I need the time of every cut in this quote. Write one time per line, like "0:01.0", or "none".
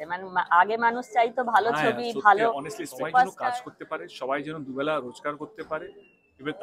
0:03.4

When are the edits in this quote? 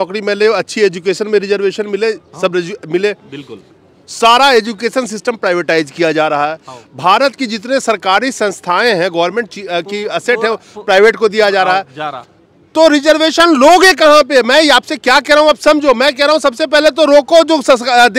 none

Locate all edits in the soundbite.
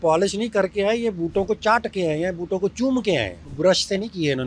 0:03.4

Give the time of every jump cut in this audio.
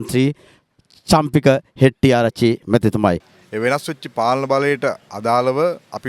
0:03.3

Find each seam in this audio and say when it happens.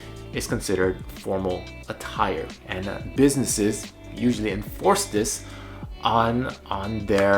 0:02.6

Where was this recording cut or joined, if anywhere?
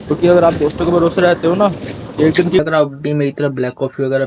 0:02.6

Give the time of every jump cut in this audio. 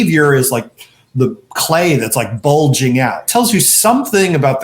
0:03.2

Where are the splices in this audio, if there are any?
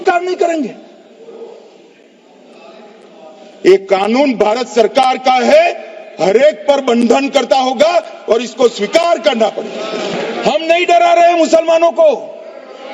0:10.1

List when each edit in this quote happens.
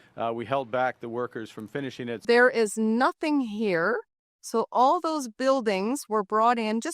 0:02.2

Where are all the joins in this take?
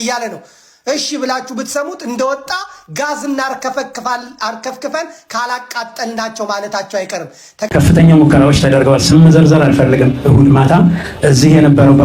0:07.7

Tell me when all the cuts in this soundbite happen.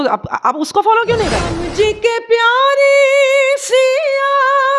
0:01.6

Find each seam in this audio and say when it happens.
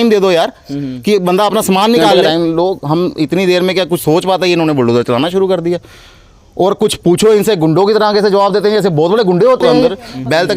0:02.2
0:09.8

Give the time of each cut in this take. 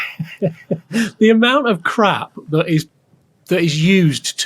none

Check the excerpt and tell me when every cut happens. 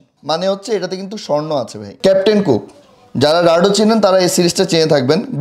0:01.8

